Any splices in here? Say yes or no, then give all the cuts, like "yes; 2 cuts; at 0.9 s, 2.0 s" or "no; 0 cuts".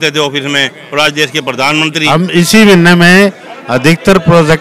yes; 2 cuts; at 2.0 s, 3.8 s